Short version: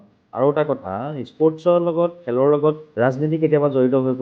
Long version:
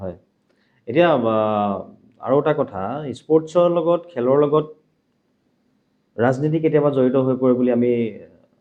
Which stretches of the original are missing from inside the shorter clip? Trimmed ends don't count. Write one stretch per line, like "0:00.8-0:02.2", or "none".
0:04.7-0:06.1